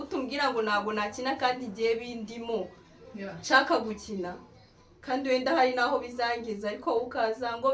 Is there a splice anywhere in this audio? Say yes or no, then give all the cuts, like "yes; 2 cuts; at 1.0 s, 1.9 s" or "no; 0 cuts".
no; 0 cuts